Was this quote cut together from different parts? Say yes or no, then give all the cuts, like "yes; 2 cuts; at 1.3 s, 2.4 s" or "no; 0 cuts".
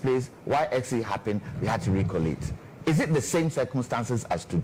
no; 0 cuts